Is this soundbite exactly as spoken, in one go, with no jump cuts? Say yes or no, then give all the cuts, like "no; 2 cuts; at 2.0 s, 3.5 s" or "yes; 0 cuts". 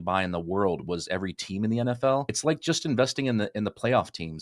no; 1 cut; at 2.3 s